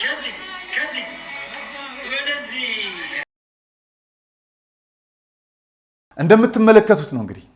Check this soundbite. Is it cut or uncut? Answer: uncut